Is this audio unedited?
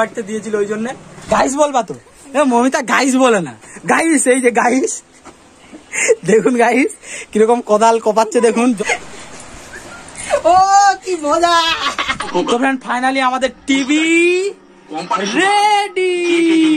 no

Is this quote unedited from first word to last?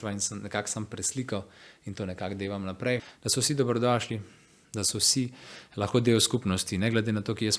no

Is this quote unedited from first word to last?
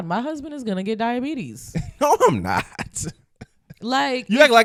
yes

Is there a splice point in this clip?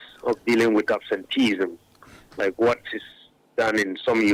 no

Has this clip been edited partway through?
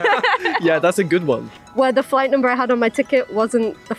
yes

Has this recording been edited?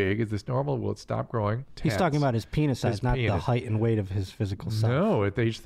yes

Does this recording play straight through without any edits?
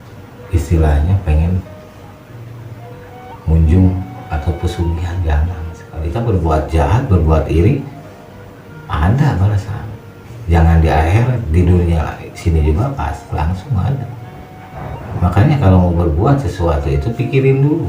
no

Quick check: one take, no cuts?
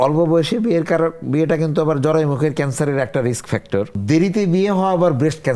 no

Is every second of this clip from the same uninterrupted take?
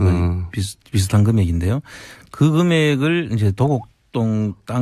no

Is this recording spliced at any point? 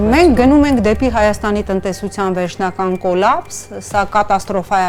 no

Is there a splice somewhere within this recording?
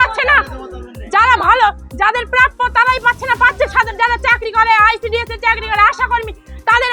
no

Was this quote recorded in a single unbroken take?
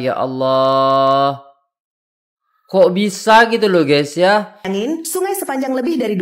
no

